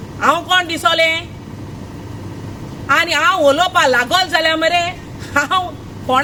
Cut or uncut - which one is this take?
uncut